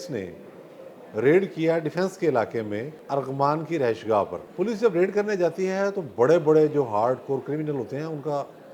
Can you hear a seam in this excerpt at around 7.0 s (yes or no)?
no